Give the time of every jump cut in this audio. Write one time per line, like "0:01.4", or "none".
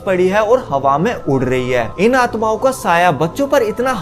0:01.9